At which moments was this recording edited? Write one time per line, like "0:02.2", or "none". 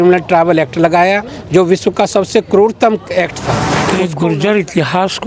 0:03.8

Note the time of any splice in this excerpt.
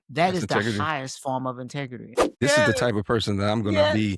0:02.3

